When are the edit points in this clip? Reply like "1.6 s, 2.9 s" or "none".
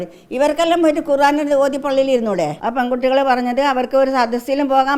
2.6 s